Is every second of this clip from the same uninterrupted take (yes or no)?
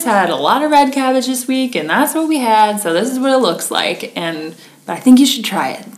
yes